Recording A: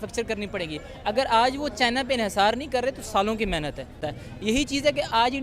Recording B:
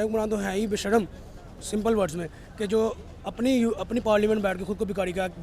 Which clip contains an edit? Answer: A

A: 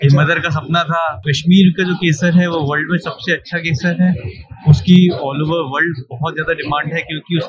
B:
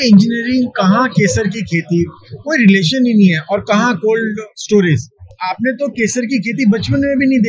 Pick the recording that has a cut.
A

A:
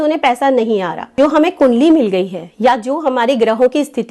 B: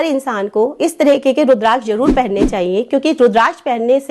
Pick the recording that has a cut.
A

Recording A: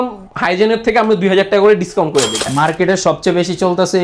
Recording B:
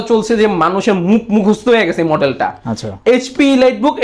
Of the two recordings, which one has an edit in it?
A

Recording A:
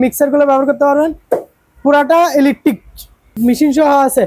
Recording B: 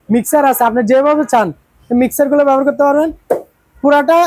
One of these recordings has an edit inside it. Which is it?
A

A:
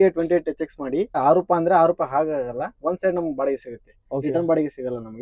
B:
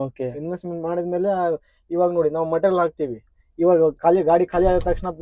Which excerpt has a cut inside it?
A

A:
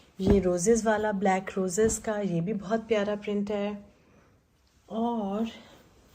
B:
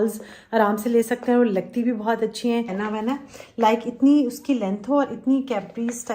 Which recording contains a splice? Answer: B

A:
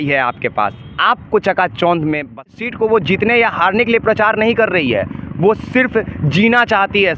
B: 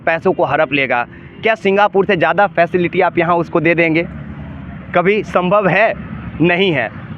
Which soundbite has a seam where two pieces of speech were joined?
A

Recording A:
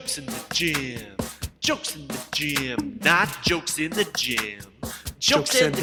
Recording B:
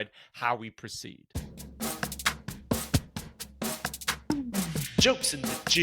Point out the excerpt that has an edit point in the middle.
B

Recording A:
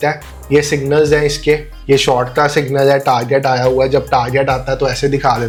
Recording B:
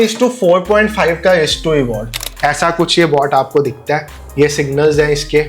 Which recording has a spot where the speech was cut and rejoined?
B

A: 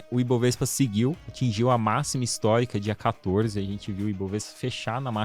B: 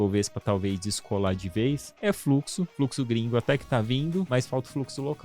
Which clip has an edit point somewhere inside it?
B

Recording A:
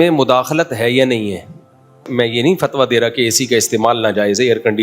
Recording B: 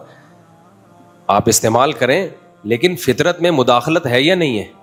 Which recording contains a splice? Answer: A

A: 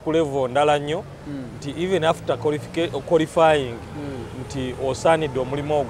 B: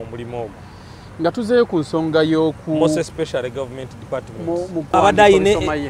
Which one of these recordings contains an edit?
B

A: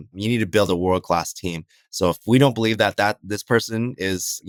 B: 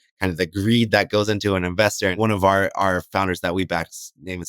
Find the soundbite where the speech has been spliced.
B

